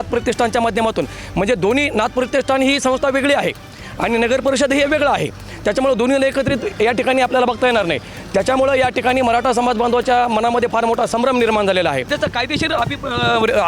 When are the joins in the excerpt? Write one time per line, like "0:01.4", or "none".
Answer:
0:12.1

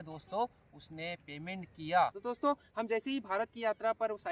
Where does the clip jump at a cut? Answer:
0:02.2

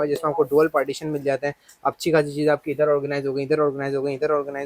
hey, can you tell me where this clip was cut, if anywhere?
none

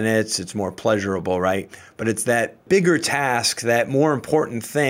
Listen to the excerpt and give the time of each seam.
0:02.6

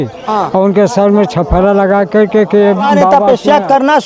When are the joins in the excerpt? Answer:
0:03.0

